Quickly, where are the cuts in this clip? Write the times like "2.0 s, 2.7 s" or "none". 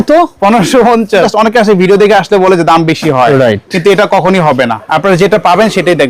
1.3 s, 4.8 s